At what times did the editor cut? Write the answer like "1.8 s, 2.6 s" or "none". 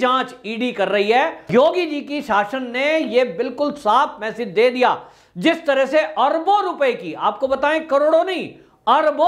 1.5 s